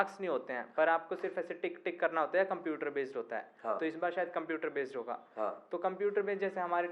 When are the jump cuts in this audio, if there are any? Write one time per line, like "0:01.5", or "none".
none